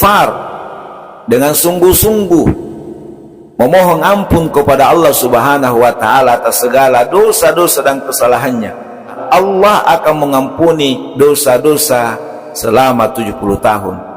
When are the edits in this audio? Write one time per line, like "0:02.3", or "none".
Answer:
0:09.2